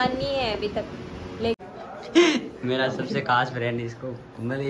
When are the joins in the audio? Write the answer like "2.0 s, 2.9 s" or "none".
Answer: 1.6 s